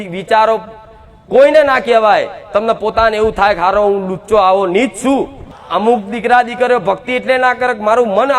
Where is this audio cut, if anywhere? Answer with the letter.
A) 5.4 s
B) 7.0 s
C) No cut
A